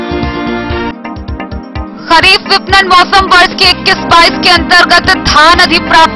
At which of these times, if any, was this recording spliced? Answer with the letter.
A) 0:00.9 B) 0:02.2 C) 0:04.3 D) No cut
A